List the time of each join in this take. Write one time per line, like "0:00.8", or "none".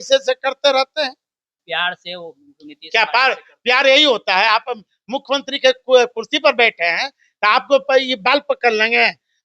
0:01.6